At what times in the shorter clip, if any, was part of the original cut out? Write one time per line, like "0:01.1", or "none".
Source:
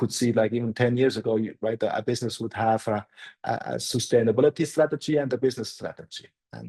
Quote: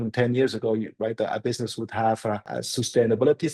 0:02.6